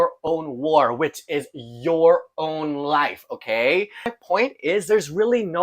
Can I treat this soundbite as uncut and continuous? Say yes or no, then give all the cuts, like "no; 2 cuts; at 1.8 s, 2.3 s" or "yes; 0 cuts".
no; 1 cut; at 4.0 s